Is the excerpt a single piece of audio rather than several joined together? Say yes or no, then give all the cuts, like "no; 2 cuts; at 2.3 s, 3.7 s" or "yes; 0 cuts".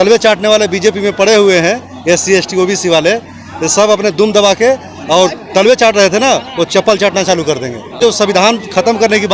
no; 1 cut; at 8.0 s